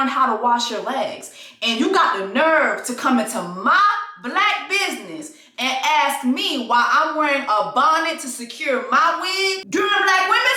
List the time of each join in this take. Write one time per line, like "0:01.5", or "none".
0:09.6